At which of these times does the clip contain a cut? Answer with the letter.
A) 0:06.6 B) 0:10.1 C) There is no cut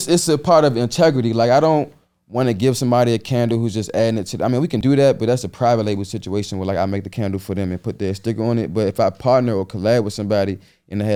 C